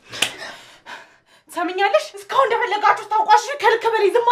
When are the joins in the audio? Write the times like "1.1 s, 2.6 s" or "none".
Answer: 2.2 s